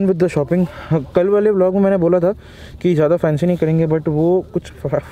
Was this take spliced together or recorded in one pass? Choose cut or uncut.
uncut